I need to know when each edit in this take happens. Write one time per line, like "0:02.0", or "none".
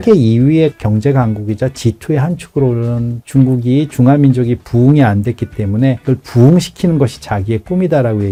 none

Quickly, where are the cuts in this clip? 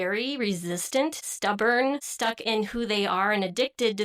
0:01.3
0:02.1

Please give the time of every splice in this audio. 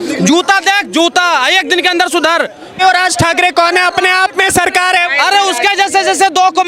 none

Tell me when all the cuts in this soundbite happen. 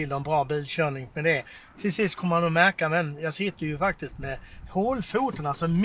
none

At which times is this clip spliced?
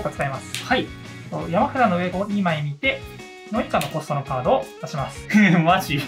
0:02.1
0:05.2

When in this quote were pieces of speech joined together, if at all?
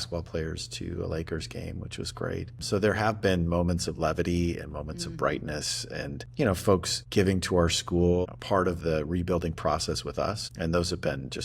0:02.6
0:06.2
0:07.0
0:08.2
0:10.5

